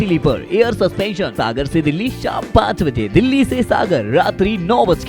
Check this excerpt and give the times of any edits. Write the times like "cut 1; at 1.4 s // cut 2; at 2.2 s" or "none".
cut 1; at 1.3 s